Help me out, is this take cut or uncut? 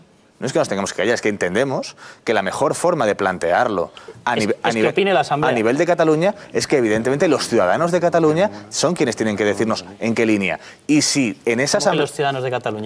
uncut